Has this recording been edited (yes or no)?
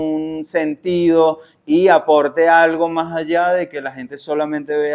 no